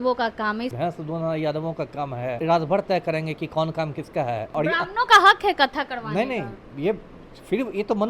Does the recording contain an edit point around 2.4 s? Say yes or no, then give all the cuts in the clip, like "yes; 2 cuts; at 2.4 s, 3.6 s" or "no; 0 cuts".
yes; 3 cuts; at 0.7 s, 2.4 s, 4.5 s